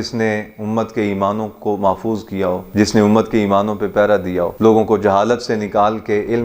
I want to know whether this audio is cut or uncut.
uncut